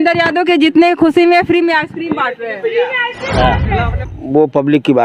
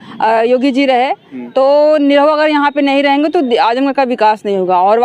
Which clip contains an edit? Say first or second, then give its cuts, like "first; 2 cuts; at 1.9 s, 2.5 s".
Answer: first; 1 cut; at 4.1 s